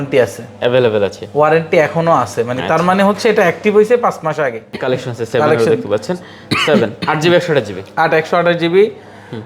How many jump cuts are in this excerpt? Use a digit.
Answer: 1